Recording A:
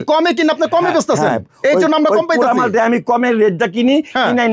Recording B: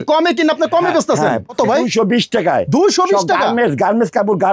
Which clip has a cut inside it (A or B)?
B